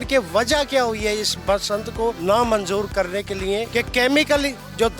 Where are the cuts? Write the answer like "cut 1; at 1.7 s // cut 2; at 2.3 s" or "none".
cut 1; at 2.2 s // cut 2; at 3.7 s